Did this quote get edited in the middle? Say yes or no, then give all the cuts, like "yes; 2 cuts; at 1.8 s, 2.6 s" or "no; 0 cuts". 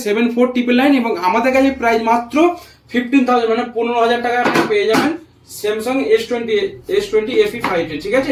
no; 0 cuts